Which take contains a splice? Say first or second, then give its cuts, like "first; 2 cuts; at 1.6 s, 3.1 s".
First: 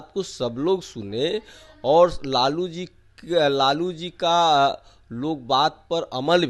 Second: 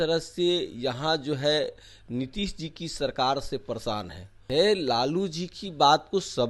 second; 1 cut; at 4.4 s